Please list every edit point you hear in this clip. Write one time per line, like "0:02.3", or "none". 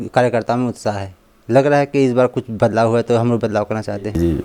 none

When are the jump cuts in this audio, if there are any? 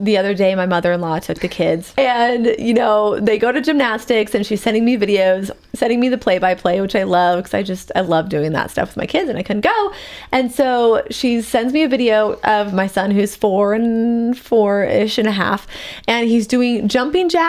0:02.0

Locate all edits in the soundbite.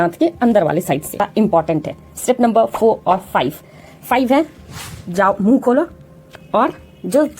0:01.2

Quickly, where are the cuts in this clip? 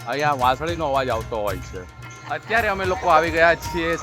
0:02.2

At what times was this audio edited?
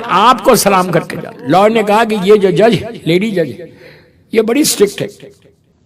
0:01.3

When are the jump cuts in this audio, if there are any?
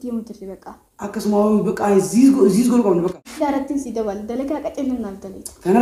0:03.2

